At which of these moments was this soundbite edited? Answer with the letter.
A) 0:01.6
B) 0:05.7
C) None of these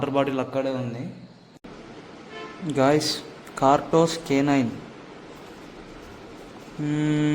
A